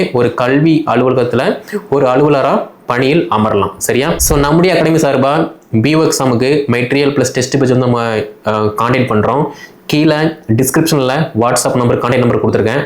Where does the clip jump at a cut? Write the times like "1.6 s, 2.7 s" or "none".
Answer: 4.2 s